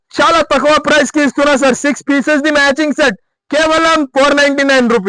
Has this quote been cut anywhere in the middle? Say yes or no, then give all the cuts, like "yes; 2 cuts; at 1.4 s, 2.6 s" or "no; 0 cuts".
no; 0 cuts